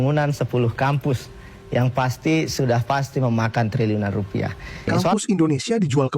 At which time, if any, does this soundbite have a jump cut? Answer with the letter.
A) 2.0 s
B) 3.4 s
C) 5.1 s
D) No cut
C